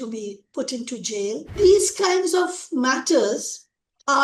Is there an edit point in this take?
yes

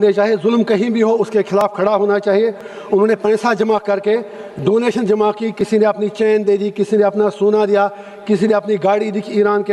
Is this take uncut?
yes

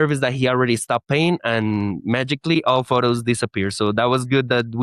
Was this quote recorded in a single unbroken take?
yes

